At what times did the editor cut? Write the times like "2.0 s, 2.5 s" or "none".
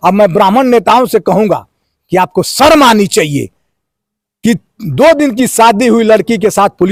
none

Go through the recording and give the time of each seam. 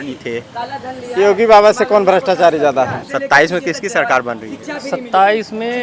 3.0 s

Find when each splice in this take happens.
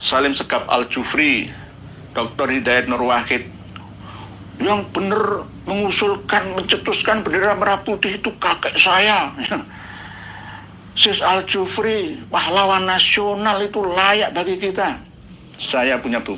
none

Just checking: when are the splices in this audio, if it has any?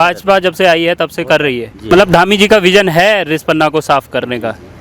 1.9 s

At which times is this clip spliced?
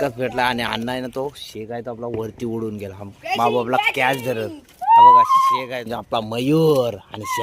5.9 s

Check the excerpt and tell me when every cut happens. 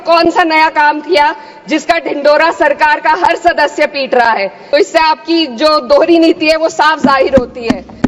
4.6 s

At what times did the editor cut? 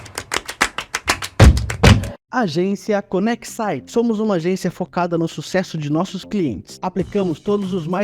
2.2 s

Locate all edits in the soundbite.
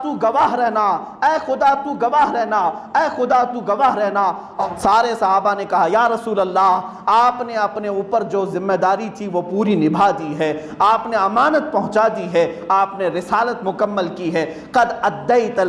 4.6 s

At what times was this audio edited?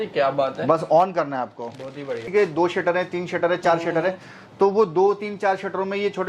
2.2 s

